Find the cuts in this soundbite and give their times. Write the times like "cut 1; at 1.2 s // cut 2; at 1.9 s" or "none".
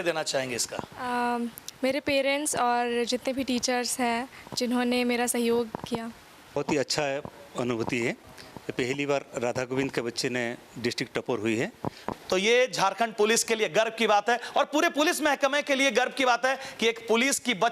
cut 1; at 6.6 s // cut 2; at 12.0 s